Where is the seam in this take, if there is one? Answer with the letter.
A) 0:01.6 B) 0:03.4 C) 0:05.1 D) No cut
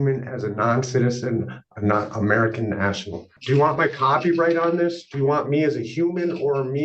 B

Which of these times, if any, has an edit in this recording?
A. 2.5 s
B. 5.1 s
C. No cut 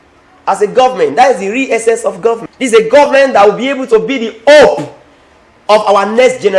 A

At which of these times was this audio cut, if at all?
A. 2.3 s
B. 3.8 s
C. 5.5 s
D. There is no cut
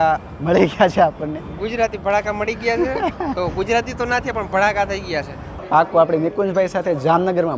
C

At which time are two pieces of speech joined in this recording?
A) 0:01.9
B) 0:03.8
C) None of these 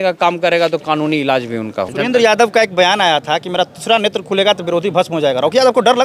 A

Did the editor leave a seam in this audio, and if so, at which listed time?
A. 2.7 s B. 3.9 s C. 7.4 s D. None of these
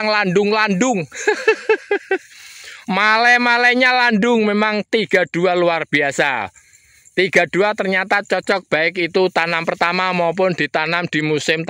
D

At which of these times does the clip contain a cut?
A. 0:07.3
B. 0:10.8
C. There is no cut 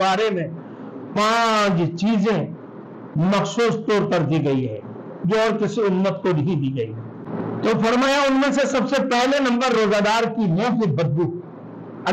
A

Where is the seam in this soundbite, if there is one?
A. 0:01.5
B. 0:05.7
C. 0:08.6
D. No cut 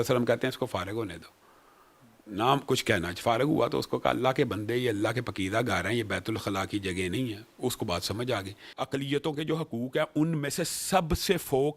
C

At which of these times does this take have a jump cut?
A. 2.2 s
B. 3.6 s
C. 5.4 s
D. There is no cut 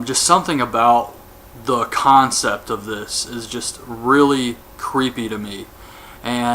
C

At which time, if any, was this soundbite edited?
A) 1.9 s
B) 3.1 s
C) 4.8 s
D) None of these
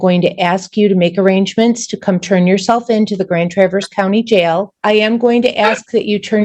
C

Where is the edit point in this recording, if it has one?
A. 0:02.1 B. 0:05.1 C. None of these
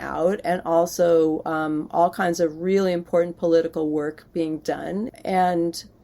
B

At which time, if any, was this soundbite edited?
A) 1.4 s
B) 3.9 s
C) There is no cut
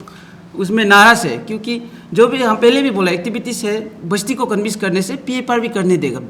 C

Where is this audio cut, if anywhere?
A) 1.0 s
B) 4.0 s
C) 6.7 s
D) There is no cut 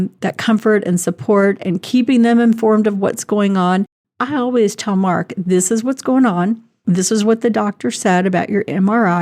B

